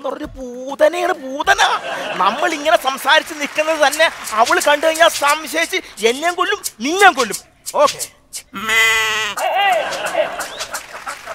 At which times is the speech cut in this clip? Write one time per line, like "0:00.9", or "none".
0:07.5

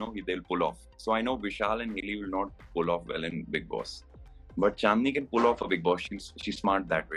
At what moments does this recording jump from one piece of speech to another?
none

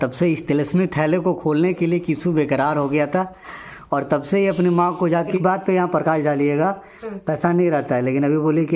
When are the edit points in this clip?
0:05.4

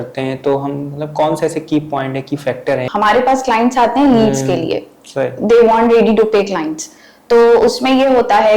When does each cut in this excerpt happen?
0:02.9

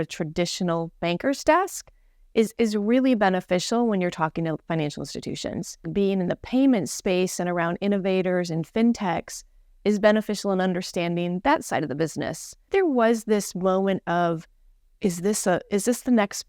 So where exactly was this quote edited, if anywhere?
0:05.9
0:12.7

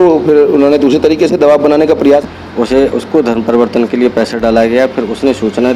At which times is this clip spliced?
0:02.3

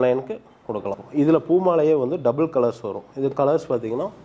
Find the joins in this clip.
0:01.0

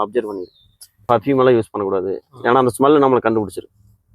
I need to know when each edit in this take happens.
0:01.1

